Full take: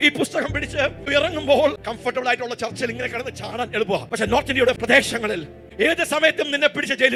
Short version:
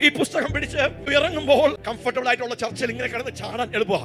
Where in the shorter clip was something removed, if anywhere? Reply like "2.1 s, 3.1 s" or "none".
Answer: none